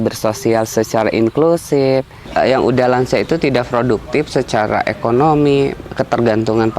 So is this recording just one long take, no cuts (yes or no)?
no